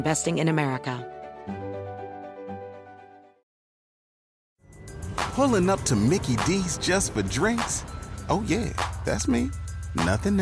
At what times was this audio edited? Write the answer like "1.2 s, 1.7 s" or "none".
1.0 s